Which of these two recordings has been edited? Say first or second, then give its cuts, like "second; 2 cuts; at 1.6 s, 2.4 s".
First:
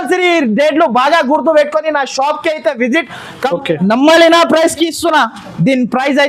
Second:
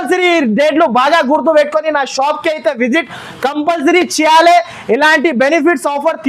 first; 1 cut; at 3.5 s